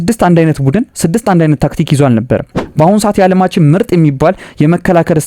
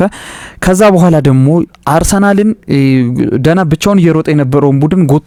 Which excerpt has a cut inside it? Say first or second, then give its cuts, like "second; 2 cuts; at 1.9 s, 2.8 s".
first; 1 cut; at 2.6 s